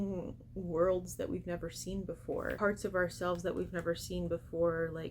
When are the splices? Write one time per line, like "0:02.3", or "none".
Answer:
0:02.6